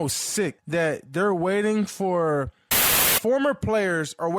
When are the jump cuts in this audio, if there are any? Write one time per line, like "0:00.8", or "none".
0:03.1